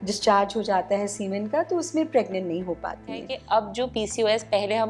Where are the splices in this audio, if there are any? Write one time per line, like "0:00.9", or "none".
0:03.3